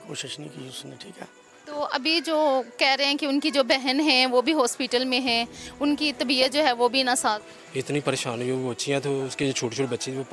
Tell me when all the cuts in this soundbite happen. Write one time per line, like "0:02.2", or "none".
0:01.5
0:07.5